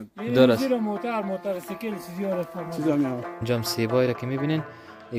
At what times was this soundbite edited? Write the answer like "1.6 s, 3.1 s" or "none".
3.4 s